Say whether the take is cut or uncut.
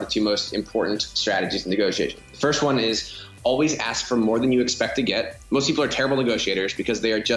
uncut